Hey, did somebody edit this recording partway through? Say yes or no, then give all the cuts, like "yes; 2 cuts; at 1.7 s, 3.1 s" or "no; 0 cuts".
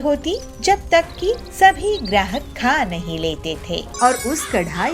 yes; 1 cut; at 3.9 s